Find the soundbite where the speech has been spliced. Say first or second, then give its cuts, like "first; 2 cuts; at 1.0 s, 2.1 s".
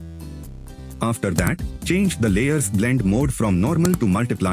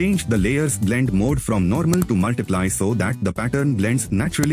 first; 1 cut; at 1.0 s